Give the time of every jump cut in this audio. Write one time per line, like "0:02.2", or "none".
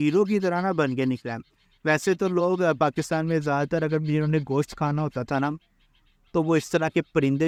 none